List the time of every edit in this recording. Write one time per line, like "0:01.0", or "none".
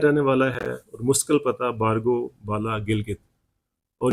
none